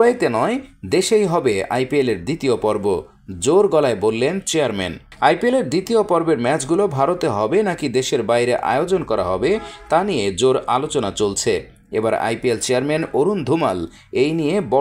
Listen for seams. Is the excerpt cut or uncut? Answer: uncut